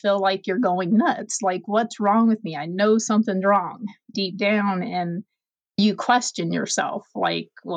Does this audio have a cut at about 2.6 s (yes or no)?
no